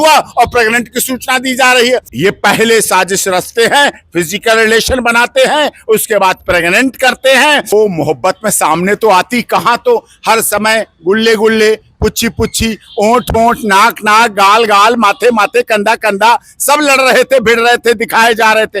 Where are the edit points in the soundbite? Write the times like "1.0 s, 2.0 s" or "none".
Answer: 2.1 s, 7.7 s